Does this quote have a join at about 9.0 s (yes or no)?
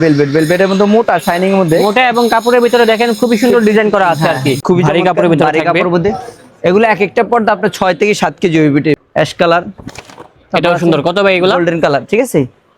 yes